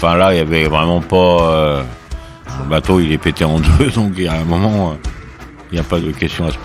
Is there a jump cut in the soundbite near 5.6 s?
yes; 2 cuts; at 2.4 s, 5.6 s

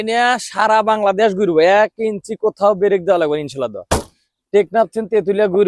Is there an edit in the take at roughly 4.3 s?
no; 0 cuts

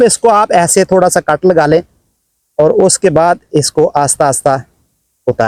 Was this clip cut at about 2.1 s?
no; 0 cuts

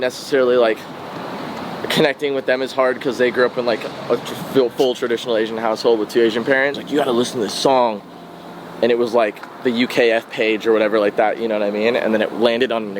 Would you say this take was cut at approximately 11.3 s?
no; 1 cut; at 6.8 s

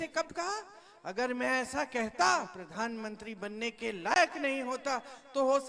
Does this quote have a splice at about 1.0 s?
no; 1 cut; at 2.6 s

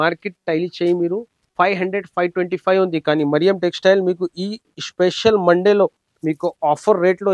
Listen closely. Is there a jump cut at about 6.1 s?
yes; 2 cuts; at 1.4 s, 6.1 s

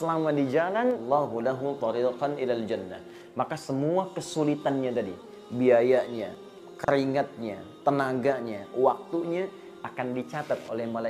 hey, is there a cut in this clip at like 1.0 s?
yes; 1 cut; at 1.0 s

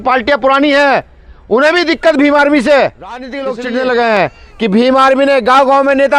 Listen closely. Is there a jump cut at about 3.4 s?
yes; 1 cut; at 3.4 s

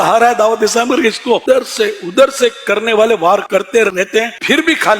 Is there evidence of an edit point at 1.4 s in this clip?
yes; 2 cuts; at 1.4 s, 3.9 s

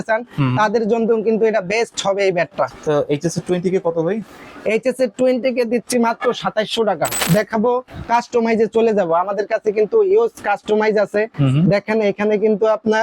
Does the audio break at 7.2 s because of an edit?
yes; 2 cuts; at 2.7 s, 7.2 s

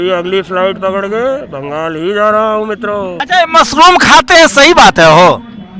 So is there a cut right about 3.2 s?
yes; 1 cut; at 3.2 s

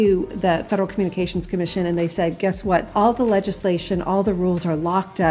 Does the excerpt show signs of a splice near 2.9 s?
yes; 1 cut; at 2.9 s

